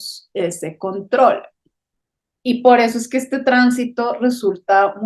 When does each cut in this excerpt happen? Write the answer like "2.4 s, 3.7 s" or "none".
none